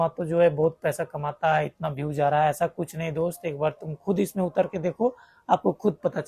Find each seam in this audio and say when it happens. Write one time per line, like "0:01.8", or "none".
none